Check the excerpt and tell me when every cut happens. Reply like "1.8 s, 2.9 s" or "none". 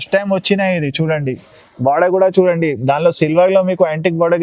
none